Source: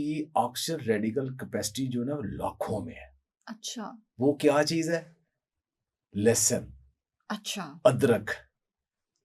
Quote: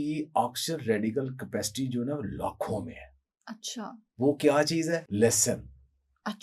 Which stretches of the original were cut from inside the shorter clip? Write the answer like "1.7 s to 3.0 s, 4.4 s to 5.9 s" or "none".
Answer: 5.0 s to 6.1 s